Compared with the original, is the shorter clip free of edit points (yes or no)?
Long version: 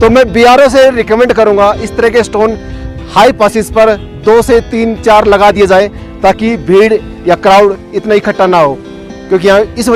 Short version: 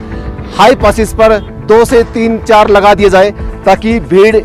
yes